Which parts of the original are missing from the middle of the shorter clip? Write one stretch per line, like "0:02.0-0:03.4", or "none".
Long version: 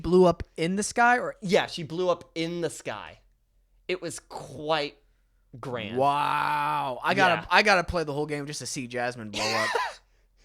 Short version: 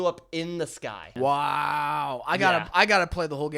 0:03.1-0:05.9